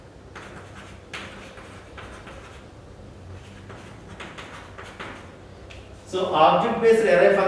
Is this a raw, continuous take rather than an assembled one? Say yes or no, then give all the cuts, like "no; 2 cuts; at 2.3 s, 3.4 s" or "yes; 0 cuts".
yes; 0 cuts